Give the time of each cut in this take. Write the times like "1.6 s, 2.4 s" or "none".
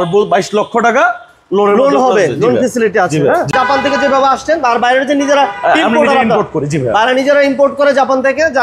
3.5 s